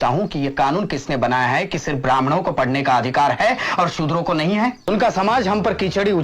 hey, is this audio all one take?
no; 1 cut; at 4.9 s

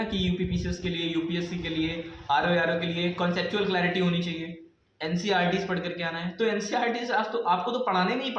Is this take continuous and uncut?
yes; 0 cuts

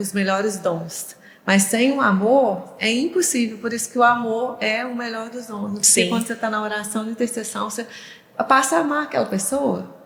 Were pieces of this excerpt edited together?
no; 0 cuts

